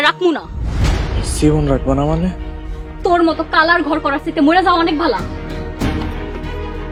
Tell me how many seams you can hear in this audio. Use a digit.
0